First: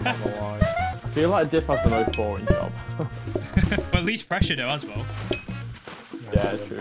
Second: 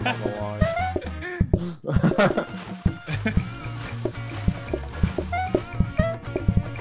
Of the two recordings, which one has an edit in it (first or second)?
first